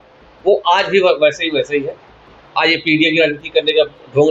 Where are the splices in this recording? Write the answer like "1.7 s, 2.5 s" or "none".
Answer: none